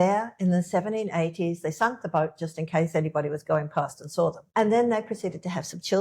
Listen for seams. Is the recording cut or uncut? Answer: cut